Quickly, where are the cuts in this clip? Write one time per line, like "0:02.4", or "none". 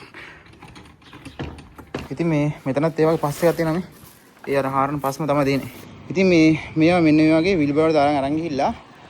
0:02.1
0:05.7